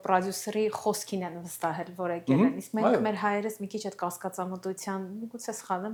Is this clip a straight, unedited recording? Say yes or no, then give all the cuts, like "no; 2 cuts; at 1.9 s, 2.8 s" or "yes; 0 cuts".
yes; 0 cuts